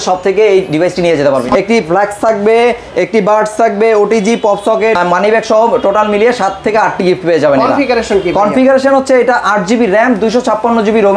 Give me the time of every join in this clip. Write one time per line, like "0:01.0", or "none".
0:01.5
0:05.0